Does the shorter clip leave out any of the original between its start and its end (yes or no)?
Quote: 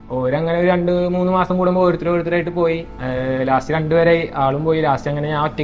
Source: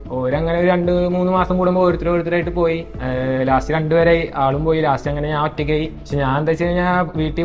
no